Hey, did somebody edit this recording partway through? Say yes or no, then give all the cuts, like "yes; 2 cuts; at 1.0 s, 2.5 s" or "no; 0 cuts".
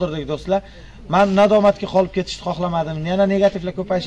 no; 0 cuts